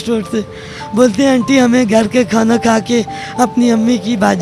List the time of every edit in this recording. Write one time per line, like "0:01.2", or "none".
none

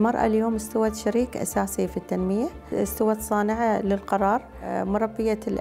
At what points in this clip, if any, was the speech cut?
0:02.6
0:04.7

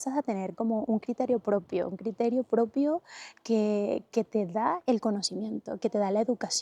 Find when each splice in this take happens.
none

